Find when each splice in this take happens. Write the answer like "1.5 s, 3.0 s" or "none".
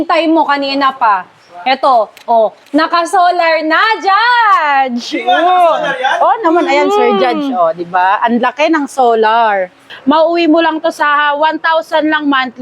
9.9 s